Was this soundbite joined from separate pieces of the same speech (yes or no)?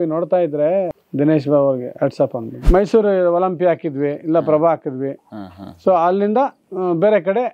yes